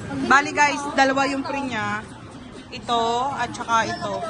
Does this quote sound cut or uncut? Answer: uncut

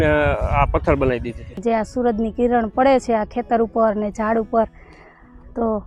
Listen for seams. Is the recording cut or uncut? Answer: cut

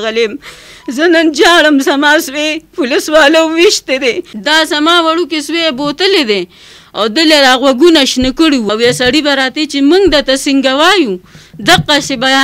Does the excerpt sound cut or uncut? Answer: cut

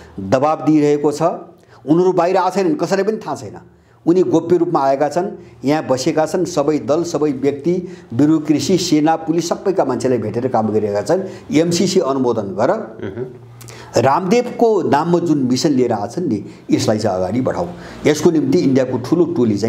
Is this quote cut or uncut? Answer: uncut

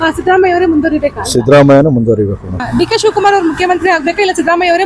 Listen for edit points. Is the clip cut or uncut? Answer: cut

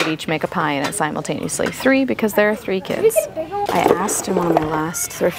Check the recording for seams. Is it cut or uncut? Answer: cut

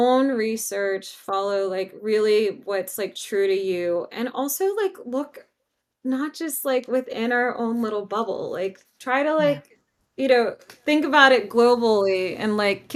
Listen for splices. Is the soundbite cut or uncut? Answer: uncut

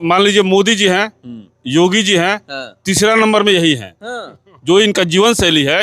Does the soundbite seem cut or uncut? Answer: uncut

